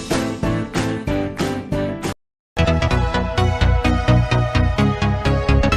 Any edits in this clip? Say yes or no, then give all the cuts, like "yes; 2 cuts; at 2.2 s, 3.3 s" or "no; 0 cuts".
yes; 1 cut; at 2.2 s